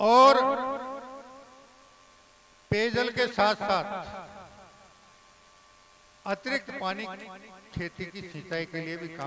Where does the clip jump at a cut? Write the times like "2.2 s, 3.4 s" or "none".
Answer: none